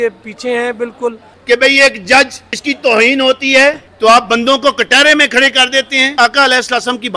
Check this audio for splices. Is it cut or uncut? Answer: cut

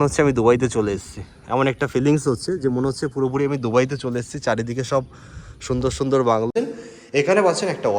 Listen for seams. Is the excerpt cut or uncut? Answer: cut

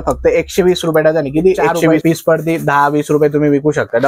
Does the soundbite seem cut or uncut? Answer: cut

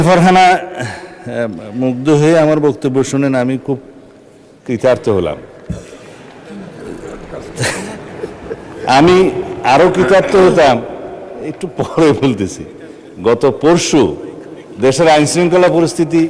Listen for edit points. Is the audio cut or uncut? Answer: uncut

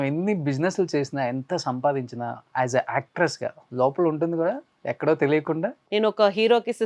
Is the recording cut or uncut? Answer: cut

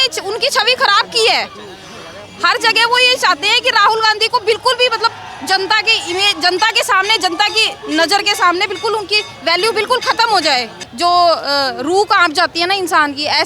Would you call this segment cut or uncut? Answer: cut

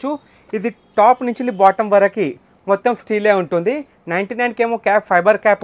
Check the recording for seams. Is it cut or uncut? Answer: uncut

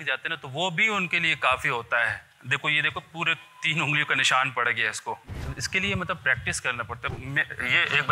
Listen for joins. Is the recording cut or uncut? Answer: cut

